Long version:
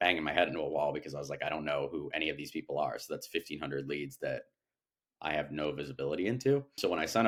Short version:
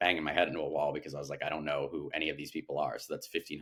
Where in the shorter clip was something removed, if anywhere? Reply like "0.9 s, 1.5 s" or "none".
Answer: none